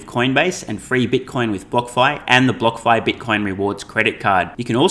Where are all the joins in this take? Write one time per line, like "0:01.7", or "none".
none